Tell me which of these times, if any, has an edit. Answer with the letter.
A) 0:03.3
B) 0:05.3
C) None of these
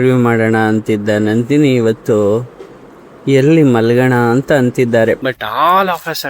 B